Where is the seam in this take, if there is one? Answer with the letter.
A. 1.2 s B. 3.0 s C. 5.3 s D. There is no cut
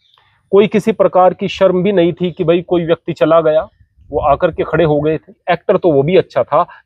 C